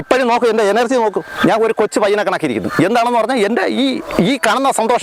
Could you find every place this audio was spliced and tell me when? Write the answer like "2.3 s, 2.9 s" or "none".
none